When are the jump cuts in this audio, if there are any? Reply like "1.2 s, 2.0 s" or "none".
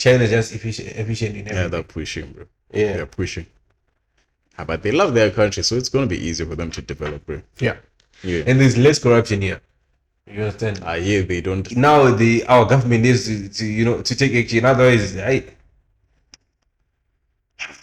11.6 s